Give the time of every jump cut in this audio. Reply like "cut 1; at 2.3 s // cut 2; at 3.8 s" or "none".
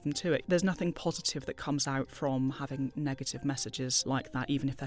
cut 1; at 4.0 s